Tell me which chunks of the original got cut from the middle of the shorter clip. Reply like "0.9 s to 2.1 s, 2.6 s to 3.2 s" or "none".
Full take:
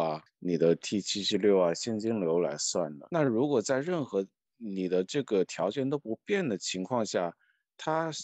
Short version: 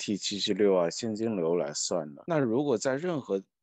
none